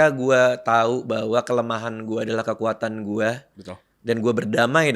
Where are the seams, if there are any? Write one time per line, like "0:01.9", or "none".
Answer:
none